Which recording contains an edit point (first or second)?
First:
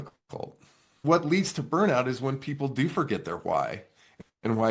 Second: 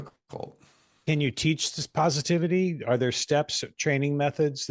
first